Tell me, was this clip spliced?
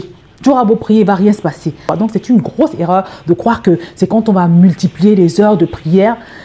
yes; 1 cut; at 1.8 s

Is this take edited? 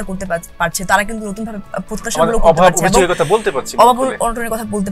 no; 0 cuts

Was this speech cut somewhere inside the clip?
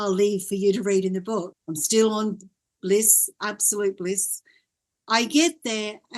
yes; 1 cut; at 1.5 s

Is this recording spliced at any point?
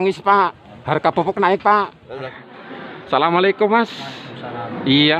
yes; 1 cut; at 2.3 s

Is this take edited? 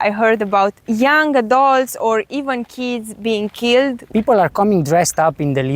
yes; 2 cuts; at 0.8 s, 4.0 s

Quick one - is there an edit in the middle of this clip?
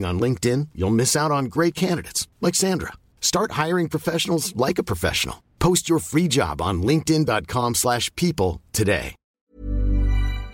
yes; 1 cut; at 9.5 s

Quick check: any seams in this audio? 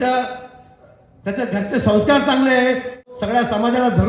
yes; 1 cut; at 3.0 s

